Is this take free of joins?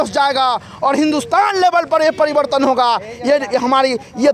yes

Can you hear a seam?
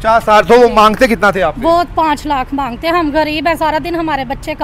no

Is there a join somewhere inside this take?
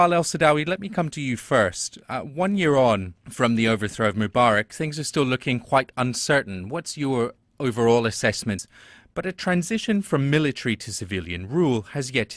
no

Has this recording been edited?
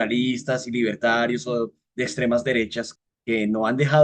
yes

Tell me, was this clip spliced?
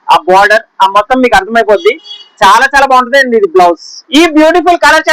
yes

